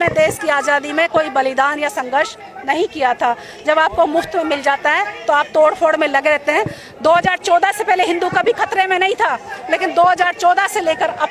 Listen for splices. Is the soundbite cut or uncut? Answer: uncut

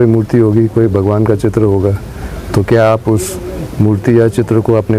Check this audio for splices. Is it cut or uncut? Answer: uncut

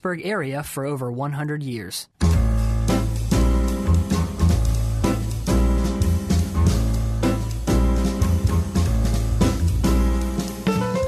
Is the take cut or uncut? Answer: cut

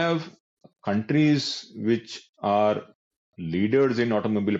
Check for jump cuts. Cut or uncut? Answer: uncut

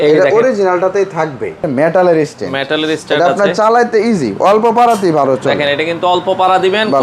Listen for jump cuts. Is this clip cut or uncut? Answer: cut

